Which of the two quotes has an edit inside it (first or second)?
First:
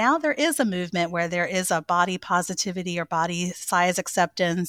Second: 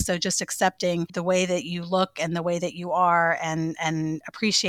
second